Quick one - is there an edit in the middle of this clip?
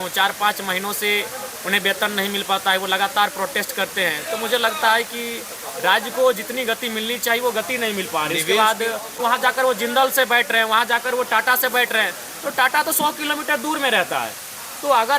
yes; 1 cut; at 9.2 s

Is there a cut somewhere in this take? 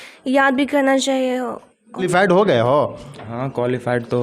yes; 1 cut; at 2.1 s

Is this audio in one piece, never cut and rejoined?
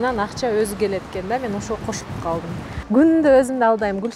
no; 1 cut; at 2.7 s

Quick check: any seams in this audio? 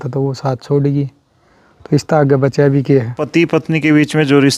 yes; 1 cut; at 3.2 s

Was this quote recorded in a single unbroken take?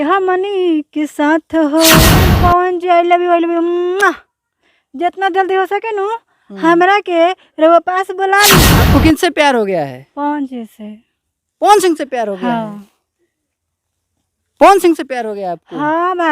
no; 2 cuts; at 2.3 s, 8.7 s

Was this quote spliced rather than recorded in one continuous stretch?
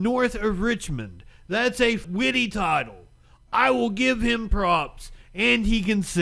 yes; 1 cut; at 2.0 s

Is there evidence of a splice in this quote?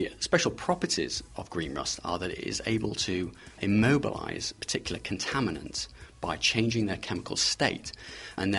yes; 1 cut; at 4.6 s

